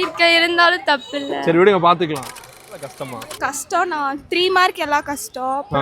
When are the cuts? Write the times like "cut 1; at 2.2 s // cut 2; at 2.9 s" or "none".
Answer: cut 1; at 2.9 s